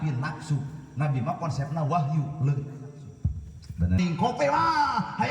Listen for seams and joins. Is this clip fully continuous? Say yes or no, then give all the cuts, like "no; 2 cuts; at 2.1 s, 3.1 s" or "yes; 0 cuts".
no; 1 cut; at 4.0 s